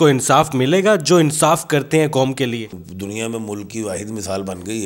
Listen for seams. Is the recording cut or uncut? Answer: cut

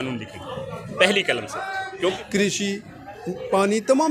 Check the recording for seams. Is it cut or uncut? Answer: cut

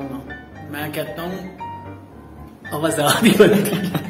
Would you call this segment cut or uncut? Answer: uncut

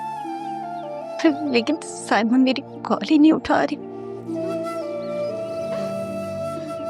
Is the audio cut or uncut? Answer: uncut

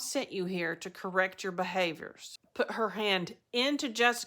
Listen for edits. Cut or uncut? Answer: cut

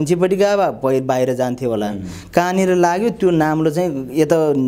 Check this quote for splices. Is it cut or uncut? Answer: uncut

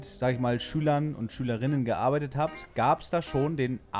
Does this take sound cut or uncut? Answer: uncut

